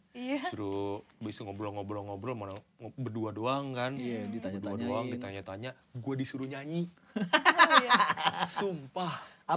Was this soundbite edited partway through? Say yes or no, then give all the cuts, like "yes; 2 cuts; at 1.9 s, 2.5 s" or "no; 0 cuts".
no; 0 cuts